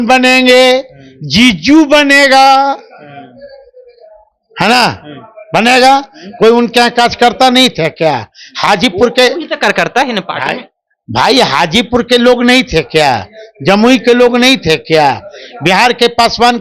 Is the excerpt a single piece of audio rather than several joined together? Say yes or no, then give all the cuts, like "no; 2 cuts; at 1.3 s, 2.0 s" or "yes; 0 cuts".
yes; 0 cuts